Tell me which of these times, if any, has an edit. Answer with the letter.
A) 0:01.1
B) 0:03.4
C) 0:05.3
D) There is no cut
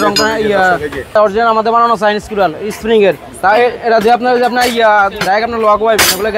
A